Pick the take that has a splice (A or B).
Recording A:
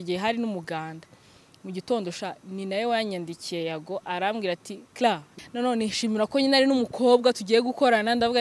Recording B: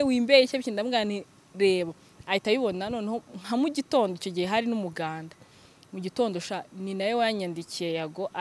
A